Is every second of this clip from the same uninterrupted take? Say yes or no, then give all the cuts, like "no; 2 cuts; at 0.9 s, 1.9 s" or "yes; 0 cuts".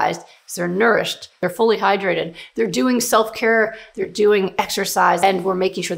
no; 3 cuts; at 1.4 s, 3.8 s, 5.2 s